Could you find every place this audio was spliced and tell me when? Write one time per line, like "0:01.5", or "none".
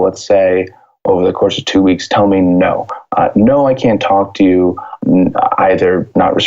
0:04.9